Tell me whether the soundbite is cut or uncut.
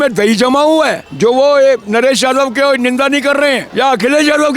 cut